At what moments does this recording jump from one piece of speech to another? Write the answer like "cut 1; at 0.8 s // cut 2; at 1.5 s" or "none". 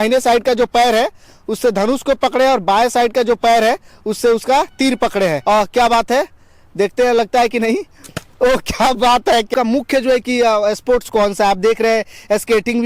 cut 1; at 5.4 s // cut 2; at 9.5 s